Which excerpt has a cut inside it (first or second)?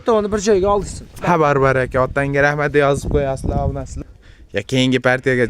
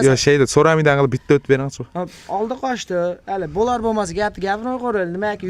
first